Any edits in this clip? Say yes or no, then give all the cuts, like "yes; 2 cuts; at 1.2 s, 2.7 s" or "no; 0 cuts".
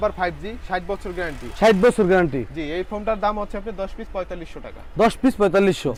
no; 0 cuts